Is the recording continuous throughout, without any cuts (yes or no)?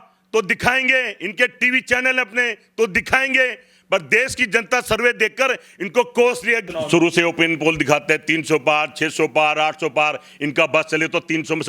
no